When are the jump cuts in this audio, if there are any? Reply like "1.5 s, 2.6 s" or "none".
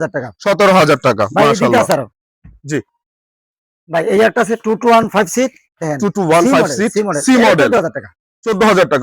none